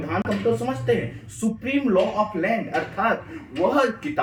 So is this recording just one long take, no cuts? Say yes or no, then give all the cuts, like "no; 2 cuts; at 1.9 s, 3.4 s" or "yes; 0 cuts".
yes; 0 cuts